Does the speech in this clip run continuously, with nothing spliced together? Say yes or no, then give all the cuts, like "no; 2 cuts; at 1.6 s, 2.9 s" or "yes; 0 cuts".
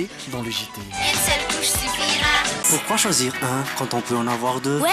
no; 1 cut; at 2.6 s